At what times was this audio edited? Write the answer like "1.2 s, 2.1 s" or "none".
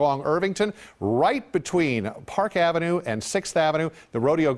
none